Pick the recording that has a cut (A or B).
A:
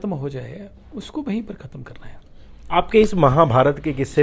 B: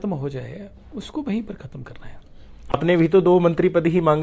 B